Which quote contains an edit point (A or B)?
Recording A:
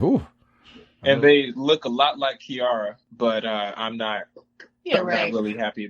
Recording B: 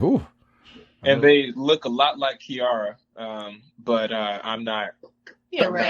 A